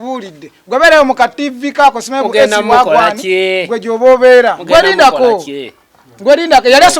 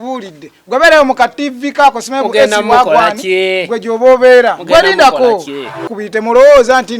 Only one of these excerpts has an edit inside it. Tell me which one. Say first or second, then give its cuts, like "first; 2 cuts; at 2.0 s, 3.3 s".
second; 1 cut; at 6.0 s